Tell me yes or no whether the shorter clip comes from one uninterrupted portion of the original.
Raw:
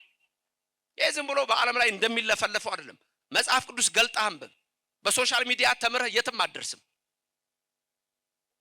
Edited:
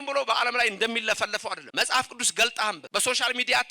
no